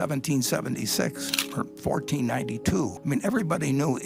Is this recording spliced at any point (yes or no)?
yes